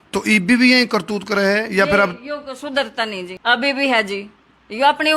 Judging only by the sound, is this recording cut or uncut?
cut